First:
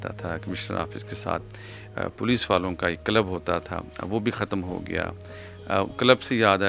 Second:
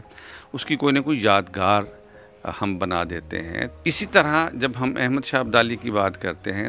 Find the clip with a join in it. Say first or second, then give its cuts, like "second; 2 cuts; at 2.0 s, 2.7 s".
second; 1 cut; at 3.7 s